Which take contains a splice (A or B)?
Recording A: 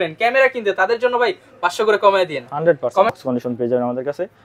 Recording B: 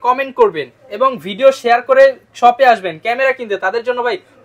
A